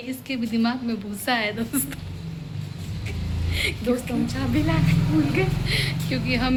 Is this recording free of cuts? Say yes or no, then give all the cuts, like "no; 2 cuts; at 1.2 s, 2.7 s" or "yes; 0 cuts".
yes; 0 cuts